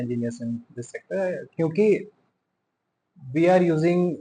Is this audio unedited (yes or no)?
yes